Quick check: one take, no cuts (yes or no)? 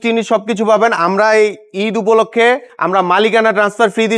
no